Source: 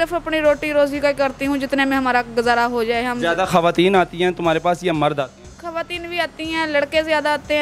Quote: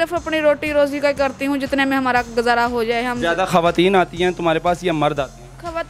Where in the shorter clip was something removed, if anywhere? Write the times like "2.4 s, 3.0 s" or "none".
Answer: none

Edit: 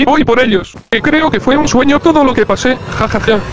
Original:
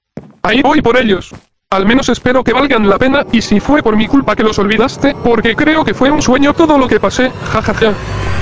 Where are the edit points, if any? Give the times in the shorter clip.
0.9 s

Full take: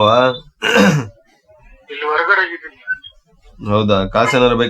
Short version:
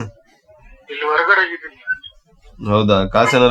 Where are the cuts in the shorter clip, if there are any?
none

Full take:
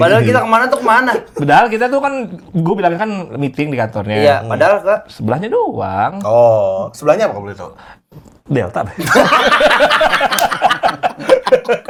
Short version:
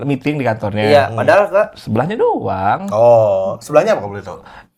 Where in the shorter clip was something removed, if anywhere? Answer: none

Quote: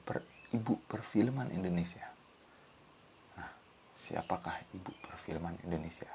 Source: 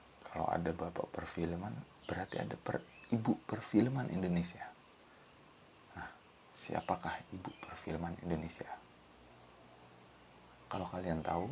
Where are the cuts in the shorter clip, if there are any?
none

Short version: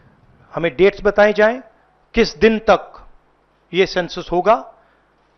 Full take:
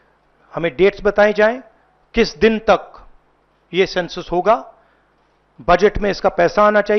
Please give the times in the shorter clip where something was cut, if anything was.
none

